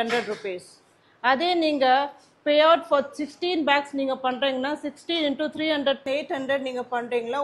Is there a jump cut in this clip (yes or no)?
yes